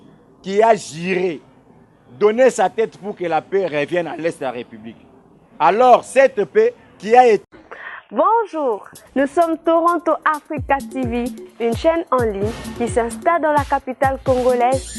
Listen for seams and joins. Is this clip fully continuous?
no; 1 cut; at 7.4 s

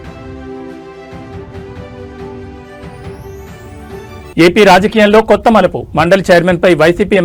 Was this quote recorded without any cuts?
yes; 0 cuts

